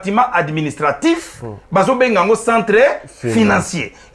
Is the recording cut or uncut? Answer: uncut